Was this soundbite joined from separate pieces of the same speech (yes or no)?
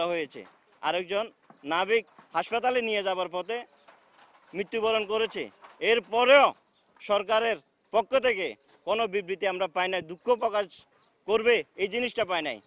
no